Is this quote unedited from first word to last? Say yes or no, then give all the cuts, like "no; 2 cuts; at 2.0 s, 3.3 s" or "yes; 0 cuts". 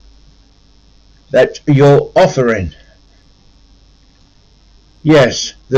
yes; 0 cuts